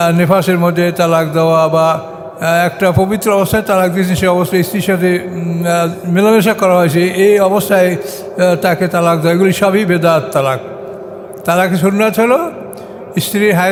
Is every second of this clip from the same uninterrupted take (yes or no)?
yes